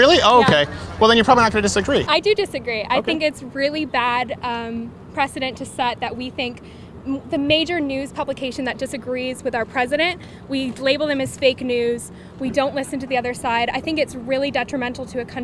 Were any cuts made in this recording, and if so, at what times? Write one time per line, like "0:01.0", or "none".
none